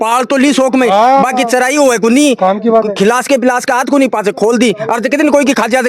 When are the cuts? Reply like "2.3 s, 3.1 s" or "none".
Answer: none